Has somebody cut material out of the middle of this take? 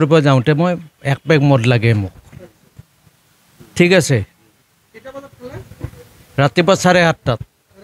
no; 0 cuts

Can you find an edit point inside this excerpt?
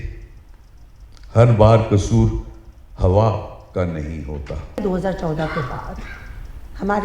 yes; 1 cut; at 4.8 s

